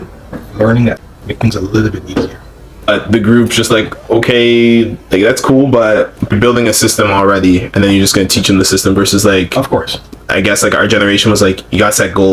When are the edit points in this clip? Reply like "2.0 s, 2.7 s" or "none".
1.0 s, 2.9 s, 6.3 s